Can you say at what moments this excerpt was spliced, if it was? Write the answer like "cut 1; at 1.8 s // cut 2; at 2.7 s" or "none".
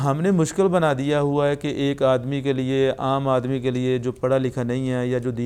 none